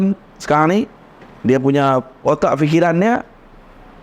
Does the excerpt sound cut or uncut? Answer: uncut